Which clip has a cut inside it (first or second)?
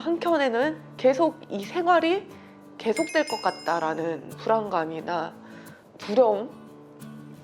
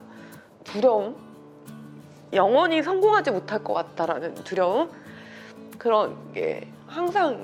first